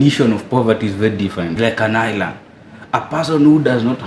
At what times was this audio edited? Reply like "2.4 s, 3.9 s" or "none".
1.5 s